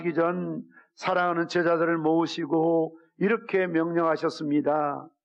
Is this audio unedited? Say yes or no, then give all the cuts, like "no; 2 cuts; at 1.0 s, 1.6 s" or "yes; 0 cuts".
yes; 0 cuts